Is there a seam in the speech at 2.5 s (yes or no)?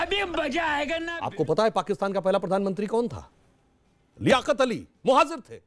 no